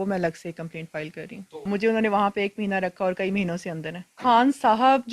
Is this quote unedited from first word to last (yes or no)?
no